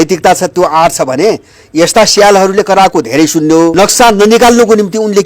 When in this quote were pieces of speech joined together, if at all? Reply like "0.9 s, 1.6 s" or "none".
3.7 s